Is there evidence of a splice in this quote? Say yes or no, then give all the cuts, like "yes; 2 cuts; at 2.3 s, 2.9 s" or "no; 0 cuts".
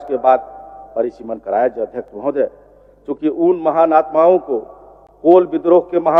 no; 0 cuts